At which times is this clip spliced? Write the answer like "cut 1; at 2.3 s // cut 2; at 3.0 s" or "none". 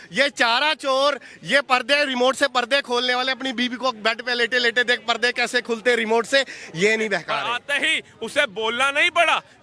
cut 1; at 7.5 s